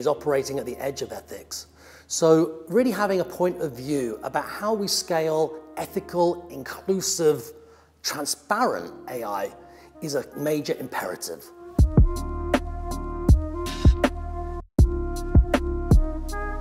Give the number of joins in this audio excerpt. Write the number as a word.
two